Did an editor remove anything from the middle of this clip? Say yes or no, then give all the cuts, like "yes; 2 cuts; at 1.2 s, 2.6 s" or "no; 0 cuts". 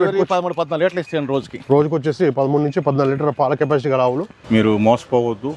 yes; 1 cut; at 4.3 s